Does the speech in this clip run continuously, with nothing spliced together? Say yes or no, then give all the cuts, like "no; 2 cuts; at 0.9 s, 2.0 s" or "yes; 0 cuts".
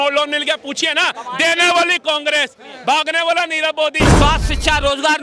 no; 1 cut; at 4.0 s